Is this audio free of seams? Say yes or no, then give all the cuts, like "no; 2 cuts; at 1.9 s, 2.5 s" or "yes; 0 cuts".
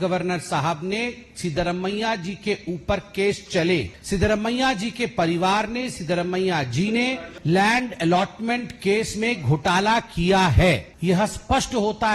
no; 3 cuts; at 3.9 s, 7.3 s, 10.9 s